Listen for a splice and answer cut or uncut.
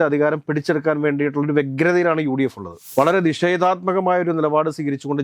cut